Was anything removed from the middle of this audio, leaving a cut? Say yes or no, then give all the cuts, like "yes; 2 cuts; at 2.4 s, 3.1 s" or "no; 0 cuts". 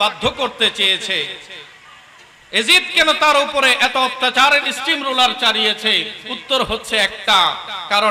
no; 0 cuts